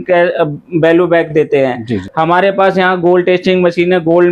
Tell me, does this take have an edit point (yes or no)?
yes